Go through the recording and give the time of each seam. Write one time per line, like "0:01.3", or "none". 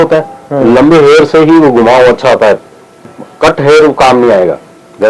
none